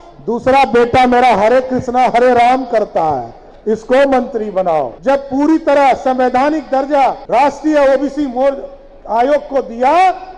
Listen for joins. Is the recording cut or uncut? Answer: cut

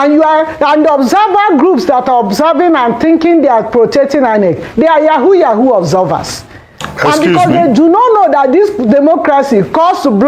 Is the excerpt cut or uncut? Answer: uncut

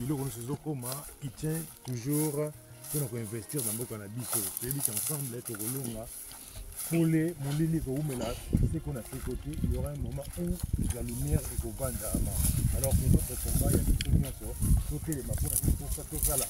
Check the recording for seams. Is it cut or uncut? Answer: uncut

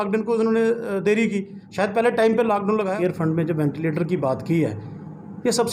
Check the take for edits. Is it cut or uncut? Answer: cut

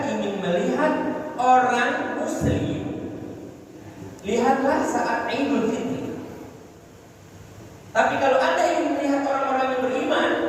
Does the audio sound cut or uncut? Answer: uncut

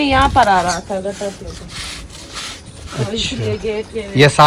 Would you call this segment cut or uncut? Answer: uncut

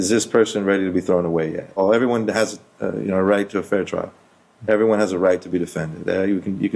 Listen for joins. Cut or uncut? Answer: cut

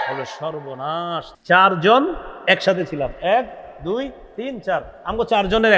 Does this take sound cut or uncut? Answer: cut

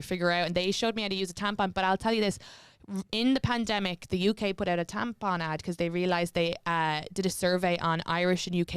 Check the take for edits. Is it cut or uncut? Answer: uncut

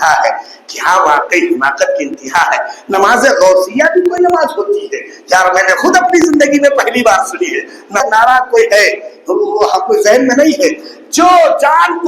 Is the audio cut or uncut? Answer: cut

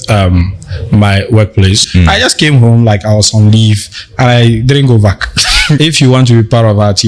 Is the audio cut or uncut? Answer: cut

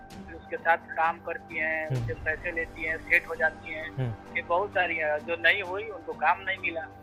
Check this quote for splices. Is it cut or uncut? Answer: uncut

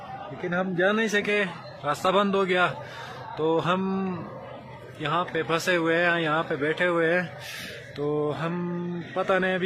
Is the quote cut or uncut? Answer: uncut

